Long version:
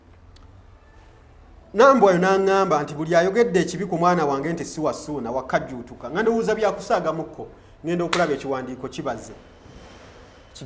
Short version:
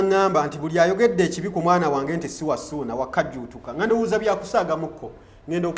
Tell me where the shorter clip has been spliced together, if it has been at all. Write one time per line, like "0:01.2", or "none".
none